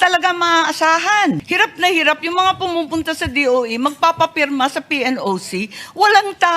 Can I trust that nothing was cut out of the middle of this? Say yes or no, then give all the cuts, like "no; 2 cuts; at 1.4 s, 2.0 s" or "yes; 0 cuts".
no; 1 cut; at 1.5 s